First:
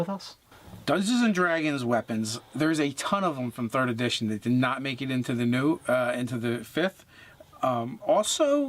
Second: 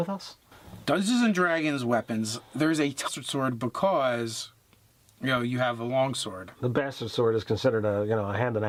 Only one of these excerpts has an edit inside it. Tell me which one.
first; 1 cut; at 3.1 s

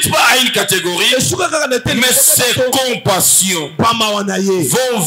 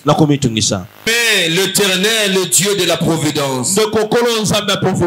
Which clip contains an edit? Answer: second; 1 cut; at 1.1 s

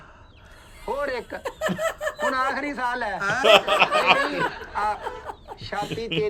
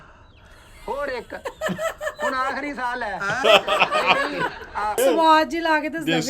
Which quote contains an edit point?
second; 1 cut; at 5.0 s

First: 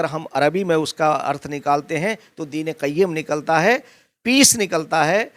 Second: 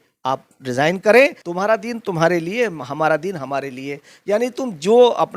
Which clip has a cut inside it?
second; 1 cut; at 1.4 s

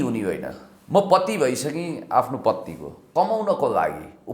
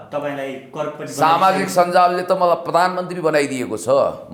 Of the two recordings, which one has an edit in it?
first; 1 cut; at 2.9 s

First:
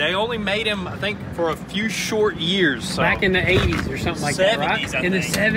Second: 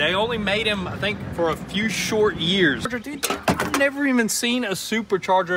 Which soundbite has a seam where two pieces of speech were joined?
second; 1 cut; at 2.9 s

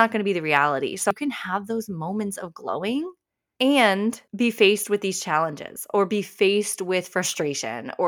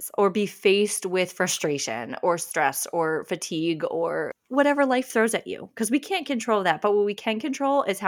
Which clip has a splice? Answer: first; 1 cut; at 1.1 s

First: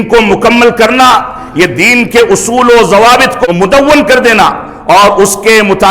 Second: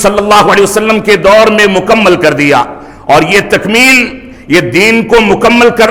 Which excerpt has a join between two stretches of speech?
first; 1 cut; at 3.4 s

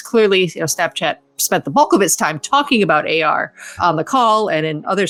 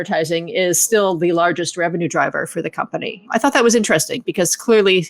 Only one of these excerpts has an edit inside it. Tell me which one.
second; 1 cut; at 3.2 s

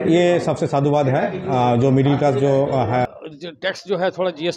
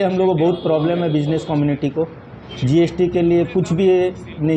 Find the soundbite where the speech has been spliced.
first; 1 cut; at 3.1 s

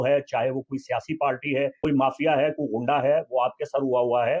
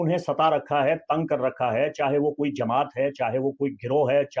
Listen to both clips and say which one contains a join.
first; 1 cut; at 1.8 s

